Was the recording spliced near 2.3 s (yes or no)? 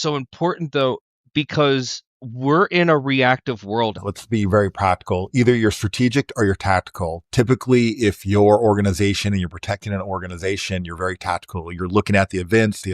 no